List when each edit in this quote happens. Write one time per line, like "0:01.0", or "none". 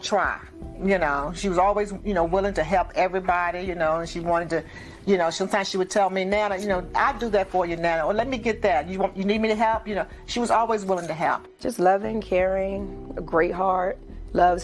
0:11.6